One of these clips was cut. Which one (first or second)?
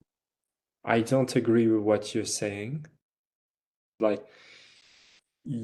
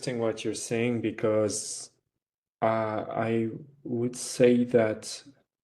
first